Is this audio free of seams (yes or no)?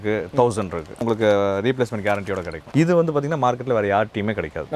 no